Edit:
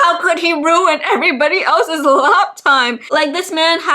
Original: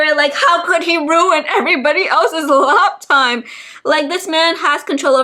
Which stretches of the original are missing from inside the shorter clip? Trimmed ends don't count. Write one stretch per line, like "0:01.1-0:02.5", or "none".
0:03.4-0:03.8